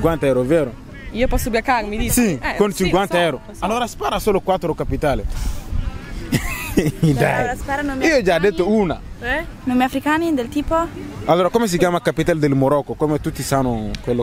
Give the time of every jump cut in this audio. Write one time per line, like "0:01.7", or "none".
none